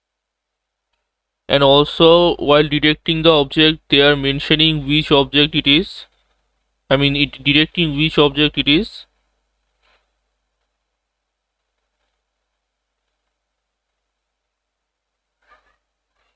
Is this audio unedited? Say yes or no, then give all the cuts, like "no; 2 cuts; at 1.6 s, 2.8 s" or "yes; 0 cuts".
yes; 0 cuts